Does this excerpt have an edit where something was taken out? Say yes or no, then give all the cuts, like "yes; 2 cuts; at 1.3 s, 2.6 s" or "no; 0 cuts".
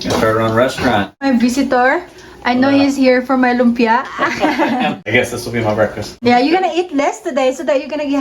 yes; 3 cuts; at 1.2 s, 5.0 s, 6.3 s